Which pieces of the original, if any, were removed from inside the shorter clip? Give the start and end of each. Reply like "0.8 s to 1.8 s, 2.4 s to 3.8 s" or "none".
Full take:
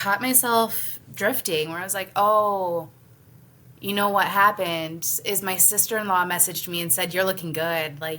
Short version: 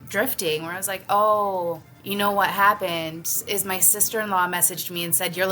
3.0 s to 3.7 s

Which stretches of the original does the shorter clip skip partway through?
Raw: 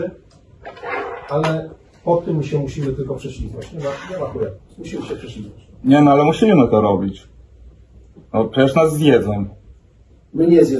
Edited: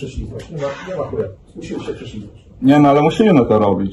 none

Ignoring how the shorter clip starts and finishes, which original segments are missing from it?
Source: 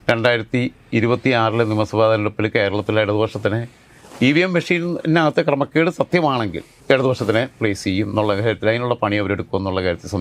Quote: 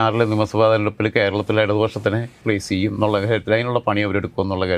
3.8 s to 7.5 s

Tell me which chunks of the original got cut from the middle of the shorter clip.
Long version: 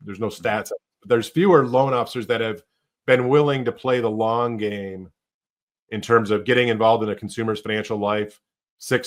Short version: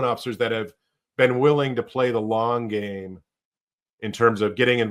none

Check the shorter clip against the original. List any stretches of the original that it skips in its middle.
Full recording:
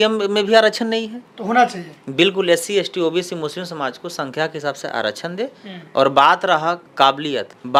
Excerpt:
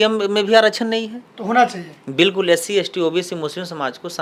none

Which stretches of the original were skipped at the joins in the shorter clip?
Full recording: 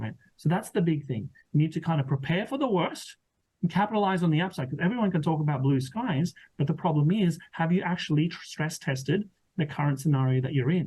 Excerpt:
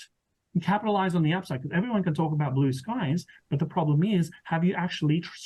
none

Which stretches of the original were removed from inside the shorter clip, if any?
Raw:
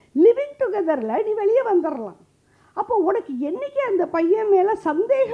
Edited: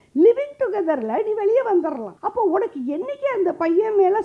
2.1 s to 2.7 s

